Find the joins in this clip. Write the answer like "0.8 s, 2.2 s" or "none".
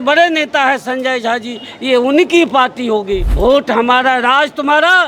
3.3 s